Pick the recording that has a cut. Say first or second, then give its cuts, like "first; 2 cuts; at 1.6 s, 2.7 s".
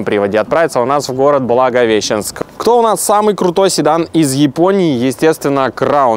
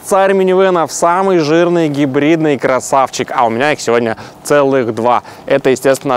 first; 1 cut; at 2.3 s